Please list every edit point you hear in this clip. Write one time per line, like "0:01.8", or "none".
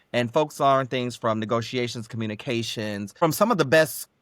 0:03.2

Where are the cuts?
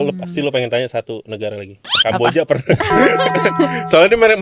none

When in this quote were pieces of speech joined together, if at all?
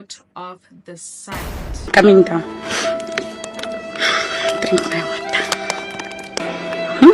0:01.9
0:06.4

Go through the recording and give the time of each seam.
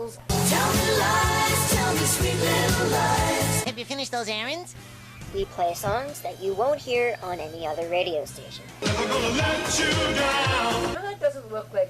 0:06.8

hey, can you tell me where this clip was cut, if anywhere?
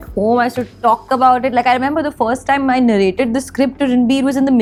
none

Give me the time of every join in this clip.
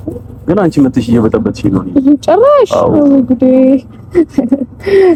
none

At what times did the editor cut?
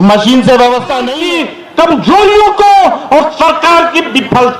0:01.2

